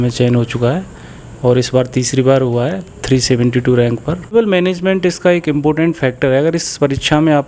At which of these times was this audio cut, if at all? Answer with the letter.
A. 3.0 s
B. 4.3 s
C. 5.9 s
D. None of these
B